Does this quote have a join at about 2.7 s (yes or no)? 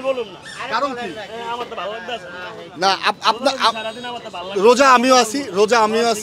no